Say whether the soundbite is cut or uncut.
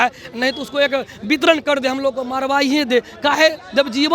uncut